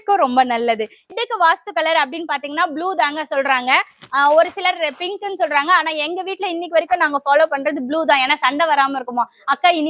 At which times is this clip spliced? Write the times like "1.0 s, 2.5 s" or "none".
1.1 s